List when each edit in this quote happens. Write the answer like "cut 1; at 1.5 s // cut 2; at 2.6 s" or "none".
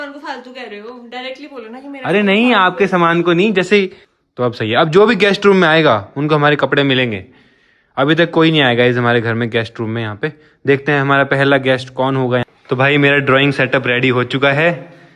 cut 1; at 4.0 s // cut 2; at 12.5 s